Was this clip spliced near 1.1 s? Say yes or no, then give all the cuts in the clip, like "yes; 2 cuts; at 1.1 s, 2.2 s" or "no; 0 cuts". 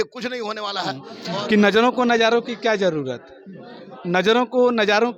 yes; 1 cut; at 1.1 s